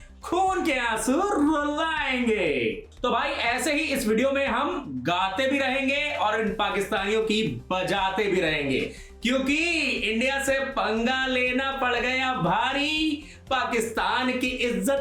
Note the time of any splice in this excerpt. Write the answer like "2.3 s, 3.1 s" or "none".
2.9 s